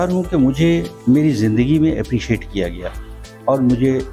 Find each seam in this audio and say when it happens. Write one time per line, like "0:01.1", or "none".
0:00.9